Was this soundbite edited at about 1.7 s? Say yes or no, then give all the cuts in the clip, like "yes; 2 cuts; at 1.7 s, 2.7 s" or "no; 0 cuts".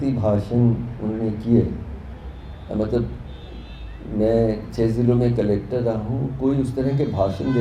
no; 0 cuts